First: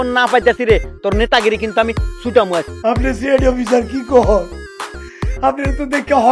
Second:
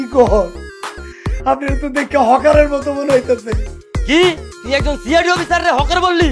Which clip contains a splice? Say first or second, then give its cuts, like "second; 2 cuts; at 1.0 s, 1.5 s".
first; 1 cut; at 2.8 s